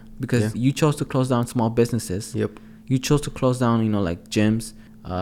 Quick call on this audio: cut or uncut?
uncut